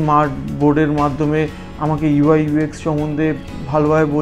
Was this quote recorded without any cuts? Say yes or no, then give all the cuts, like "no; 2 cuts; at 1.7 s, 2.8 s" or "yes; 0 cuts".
yes; 0 cuts